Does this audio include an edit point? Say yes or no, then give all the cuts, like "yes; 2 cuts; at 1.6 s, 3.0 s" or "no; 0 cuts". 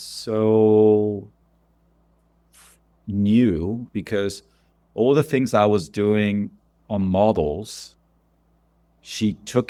no; 0 cuts